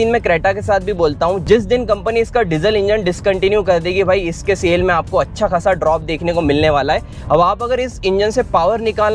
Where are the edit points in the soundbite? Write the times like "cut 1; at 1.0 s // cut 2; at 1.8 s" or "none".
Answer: cut 1; at 7.1 s